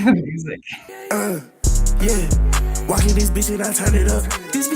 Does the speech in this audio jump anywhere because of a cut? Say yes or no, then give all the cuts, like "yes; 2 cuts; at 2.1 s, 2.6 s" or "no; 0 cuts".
yes; 1 cut; at 1.0 s